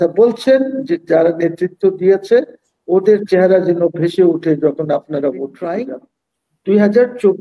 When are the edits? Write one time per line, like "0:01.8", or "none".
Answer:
0:05.8